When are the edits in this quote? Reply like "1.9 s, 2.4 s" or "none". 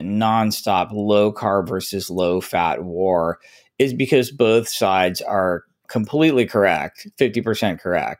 5.8 s